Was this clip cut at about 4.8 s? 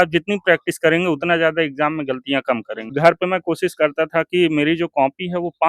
no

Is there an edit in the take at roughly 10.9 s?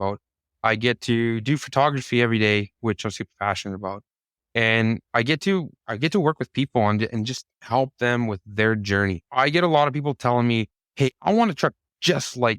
no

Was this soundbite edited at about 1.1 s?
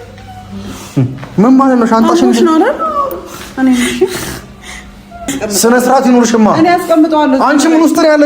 no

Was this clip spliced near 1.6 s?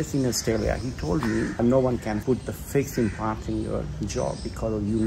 no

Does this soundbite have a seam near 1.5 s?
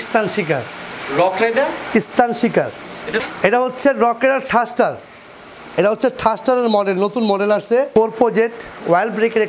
no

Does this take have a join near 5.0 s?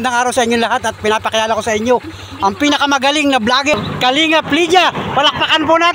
no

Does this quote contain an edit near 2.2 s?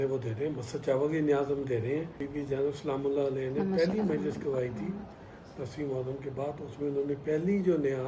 yes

